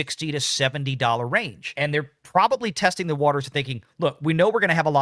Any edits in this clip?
yes; 1 cut; at 1.7 s

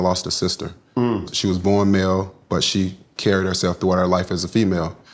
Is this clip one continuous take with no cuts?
no; 1 cut; at 1.2 s

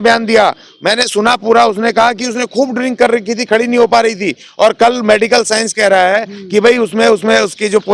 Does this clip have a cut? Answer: no; 0 cuts

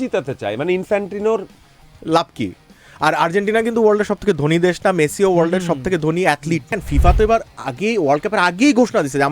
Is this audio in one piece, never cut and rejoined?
no; 1 cut; at 6.8 s

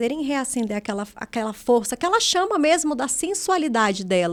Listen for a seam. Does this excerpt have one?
no; 0 cuts

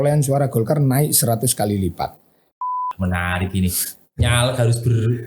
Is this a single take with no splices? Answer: no; 1 cut; at 2.5 s

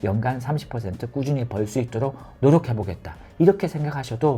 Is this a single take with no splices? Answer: yes; 0 cuts

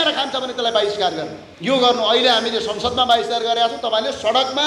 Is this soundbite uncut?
no; 1 cut; at 1.4 s

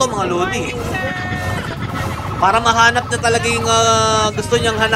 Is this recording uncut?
yes; 0 cuts

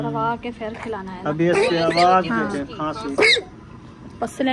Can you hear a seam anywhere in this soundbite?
no; 0 cuts

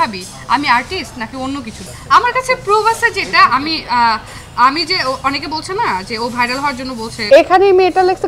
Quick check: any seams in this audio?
yes; 2 cuts; at 1.8 s, 7.3 s

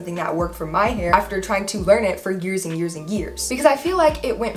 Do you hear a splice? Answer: no; 0 cuts

